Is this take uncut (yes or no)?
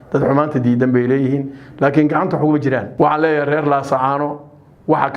no